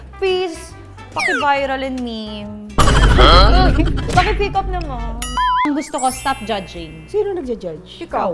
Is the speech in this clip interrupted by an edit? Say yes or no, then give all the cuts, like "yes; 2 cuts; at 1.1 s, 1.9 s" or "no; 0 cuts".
yes; 1 cut; at 5.7 s